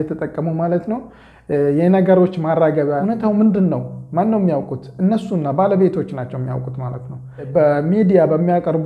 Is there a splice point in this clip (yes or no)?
yes